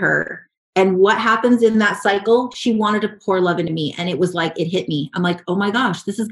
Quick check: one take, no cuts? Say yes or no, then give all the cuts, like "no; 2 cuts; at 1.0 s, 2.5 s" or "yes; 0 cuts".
yes; 0 cuts